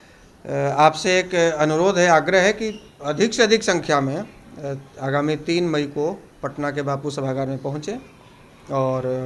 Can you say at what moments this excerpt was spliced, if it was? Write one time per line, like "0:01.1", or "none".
none